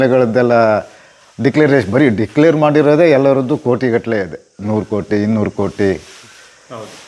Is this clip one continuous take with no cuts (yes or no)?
yes